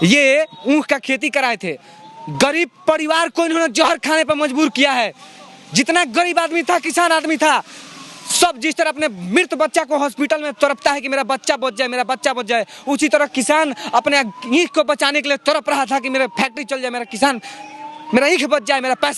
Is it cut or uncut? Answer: uncut